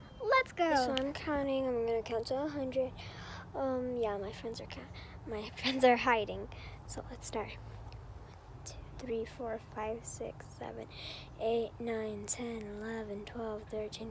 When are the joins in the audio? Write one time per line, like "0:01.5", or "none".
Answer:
0:00.9